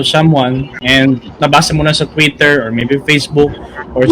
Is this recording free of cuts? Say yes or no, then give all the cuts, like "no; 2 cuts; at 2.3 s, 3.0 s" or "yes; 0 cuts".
no; 1 cut; at 1.3 s